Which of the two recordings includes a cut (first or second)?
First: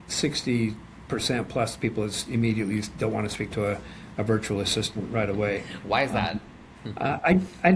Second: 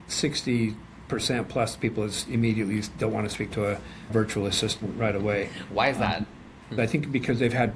second